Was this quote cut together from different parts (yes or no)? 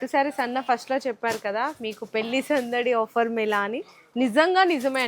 no